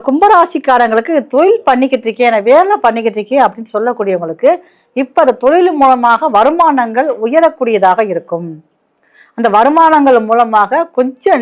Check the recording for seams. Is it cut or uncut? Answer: uncut